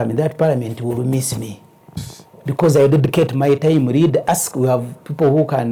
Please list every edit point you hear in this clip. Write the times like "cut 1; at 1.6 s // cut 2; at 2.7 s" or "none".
none